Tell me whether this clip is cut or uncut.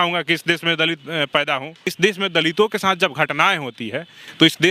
cut